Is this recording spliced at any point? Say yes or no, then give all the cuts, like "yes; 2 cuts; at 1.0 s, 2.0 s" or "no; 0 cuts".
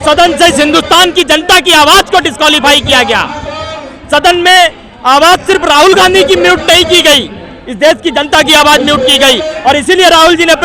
no; 0 cuts